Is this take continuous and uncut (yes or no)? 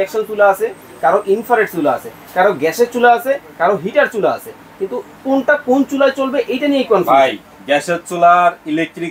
yes